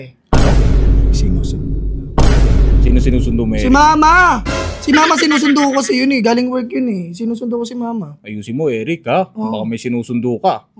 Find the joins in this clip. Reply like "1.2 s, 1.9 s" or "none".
none